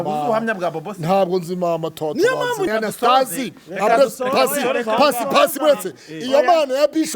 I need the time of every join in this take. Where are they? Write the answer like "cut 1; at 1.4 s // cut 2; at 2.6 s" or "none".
cut 1; at 2.7 s